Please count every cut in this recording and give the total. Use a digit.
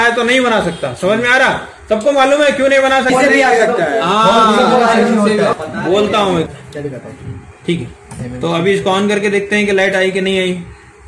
1